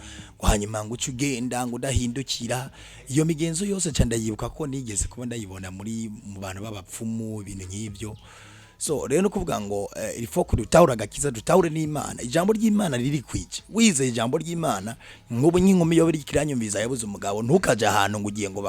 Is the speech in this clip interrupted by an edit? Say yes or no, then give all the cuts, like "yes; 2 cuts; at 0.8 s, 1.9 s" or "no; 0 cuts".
no; 0 cuts